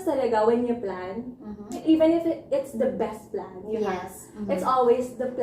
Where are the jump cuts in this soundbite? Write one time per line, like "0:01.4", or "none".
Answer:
0:01.8